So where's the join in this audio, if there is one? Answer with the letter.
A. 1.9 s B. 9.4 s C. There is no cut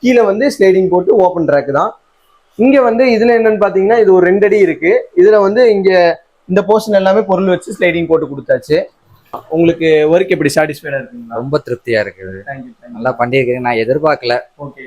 B